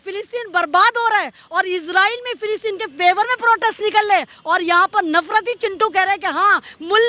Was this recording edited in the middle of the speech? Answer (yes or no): no